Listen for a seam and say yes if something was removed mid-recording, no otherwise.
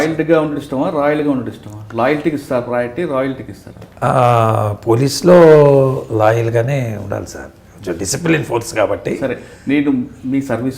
no